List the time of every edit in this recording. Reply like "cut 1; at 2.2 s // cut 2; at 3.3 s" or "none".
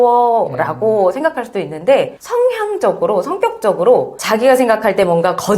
cut 1; at 4.2 s